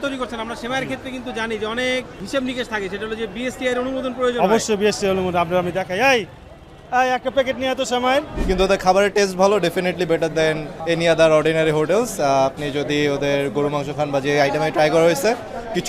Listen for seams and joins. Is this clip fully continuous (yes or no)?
no